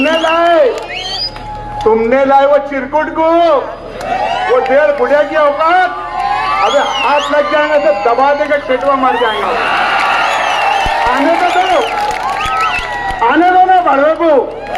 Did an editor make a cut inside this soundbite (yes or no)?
no